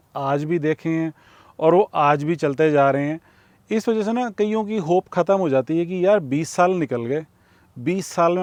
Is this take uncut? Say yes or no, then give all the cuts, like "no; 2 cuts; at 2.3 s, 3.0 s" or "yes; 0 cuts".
yes; 0 cuts